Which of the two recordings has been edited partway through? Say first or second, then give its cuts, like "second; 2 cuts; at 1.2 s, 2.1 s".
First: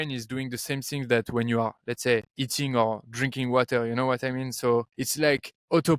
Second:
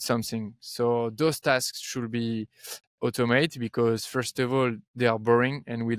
first; 2 cuts; at 2.4 s, 5.0 s